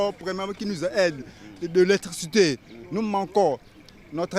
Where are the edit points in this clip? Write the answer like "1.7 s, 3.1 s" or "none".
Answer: none